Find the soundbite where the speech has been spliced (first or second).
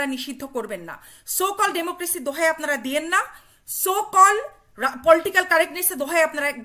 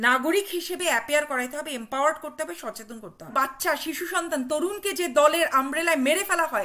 second